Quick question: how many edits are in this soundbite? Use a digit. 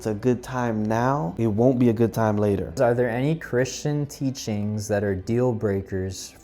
2